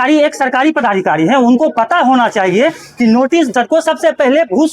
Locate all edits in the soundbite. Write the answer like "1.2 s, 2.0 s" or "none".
3.5 s